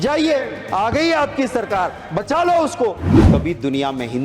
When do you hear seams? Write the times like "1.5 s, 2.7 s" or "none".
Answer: 3.1 s